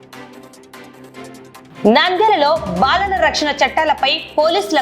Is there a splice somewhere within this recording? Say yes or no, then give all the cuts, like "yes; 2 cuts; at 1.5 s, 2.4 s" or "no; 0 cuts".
yes; 1 cut; at 1.7 s